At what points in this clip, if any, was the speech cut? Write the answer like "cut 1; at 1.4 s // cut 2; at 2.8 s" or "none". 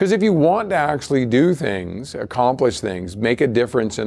none